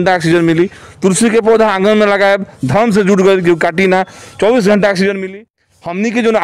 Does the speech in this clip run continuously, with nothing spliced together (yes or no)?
no